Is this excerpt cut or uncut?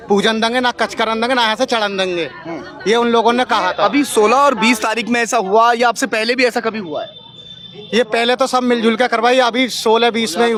uncut